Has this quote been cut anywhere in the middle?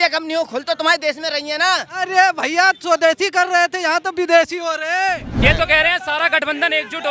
yes; 1 cut; at 5.4 s

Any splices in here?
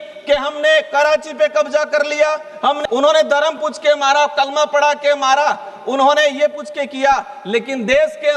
yes; 1 cut; at 2.8 s

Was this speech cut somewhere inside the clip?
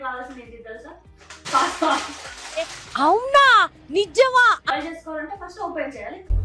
yes; 1 cut; at 4.7 s

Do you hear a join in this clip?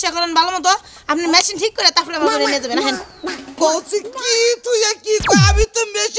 no; 0 cuts

